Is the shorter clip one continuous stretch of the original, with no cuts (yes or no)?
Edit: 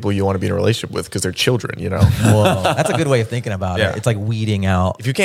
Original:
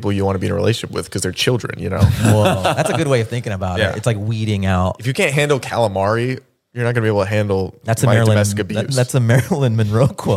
yes